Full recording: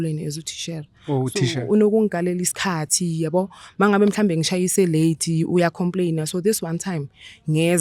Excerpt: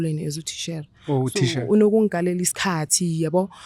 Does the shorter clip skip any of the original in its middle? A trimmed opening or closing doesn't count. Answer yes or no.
no